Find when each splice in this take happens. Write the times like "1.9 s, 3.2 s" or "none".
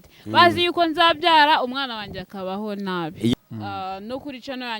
3.3 s

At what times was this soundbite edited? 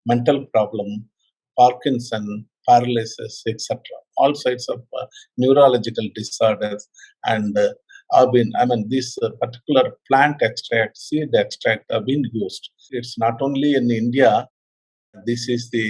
13.0 s

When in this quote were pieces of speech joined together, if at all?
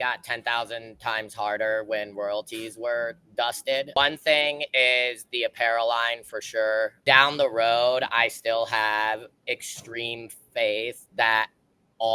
4.0 s, 7.0 s

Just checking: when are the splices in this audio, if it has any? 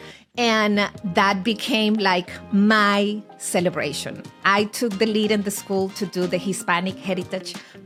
none

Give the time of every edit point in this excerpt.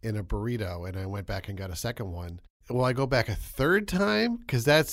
2.5 s

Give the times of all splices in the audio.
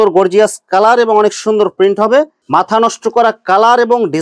2.4 s

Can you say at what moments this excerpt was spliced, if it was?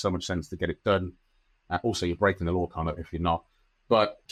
none

